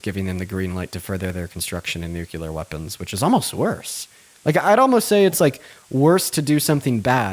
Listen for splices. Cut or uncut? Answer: uncut